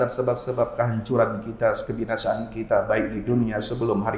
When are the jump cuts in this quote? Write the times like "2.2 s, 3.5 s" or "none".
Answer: none